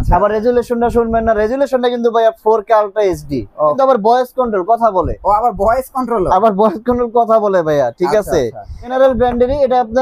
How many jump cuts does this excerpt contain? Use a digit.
2